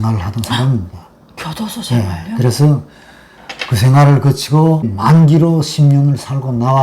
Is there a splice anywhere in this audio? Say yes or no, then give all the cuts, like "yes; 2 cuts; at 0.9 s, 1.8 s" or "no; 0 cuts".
yes; 1 cut; at 4.9 s